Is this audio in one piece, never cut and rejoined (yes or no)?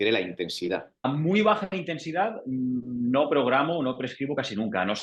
no